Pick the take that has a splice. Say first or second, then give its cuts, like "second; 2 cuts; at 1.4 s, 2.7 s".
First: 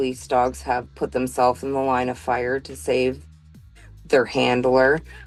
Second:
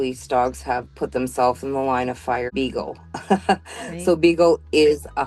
second; 1 cut; at 2.5 s